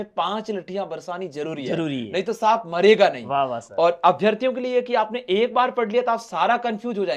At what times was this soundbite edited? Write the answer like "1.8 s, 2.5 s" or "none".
none